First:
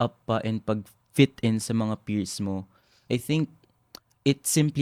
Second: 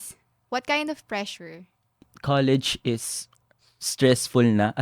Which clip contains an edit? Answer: second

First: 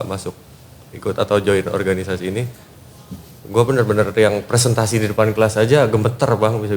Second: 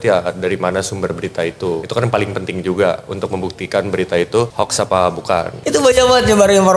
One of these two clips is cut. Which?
second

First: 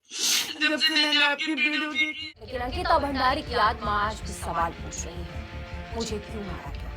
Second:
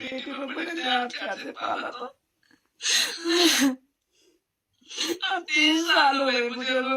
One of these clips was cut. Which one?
first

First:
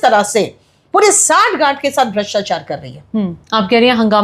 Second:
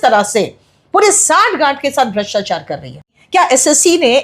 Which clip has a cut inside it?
second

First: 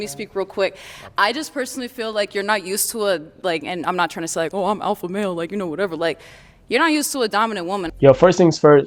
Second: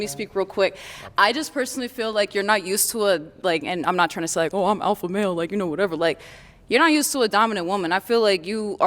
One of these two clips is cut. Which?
second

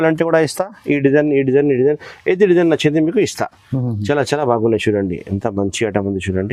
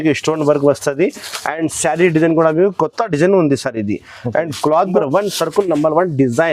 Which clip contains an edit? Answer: second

